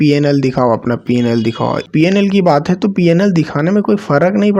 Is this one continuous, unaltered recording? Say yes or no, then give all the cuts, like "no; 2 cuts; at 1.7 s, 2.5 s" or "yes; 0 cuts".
no; 1 cut; at 1.8 s